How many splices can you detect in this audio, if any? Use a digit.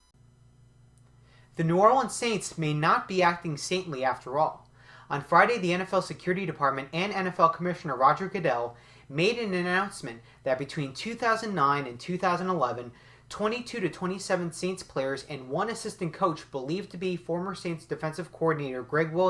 1